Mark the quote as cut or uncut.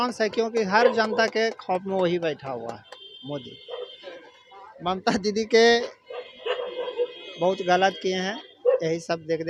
uncut